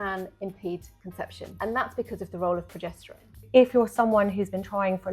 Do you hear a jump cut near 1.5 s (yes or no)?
yes